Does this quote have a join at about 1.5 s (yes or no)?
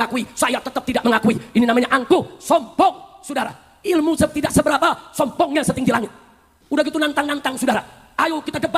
no